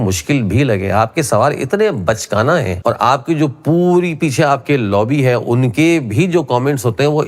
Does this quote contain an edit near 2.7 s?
yes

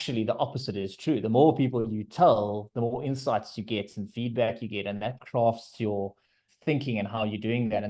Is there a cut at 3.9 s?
no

